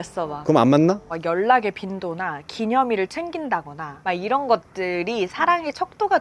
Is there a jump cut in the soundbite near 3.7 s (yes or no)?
no